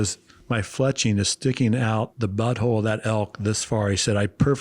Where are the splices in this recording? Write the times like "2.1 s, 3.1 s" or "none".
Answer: 2.1 s